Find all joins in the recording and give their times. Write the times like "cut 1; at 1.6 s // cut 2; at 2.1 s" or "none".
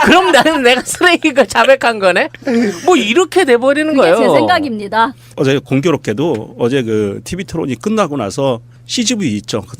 cut 1; at 6.4 s

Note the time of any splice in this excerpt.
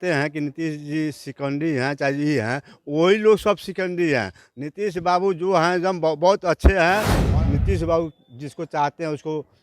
cut 1; at 7.2 s

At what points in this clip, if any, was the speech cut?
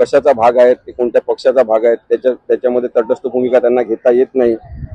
none

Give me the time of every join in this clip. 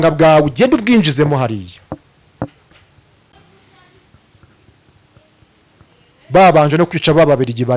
cut 1; at 3.3 s

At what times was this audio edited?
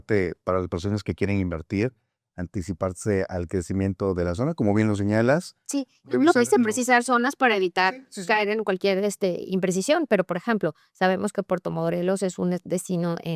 none

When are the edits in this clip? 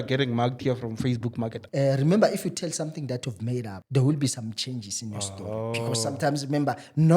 cut 1; at 1.6 s // cut 2; at 3.8 s

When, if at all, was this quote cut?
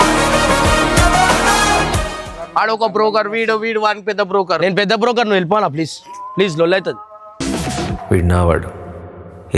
cut 1; at 2.3 s

